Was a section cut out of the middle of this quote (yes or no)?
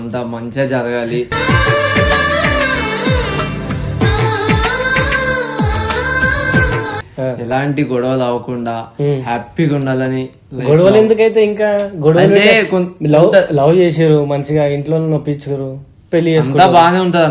no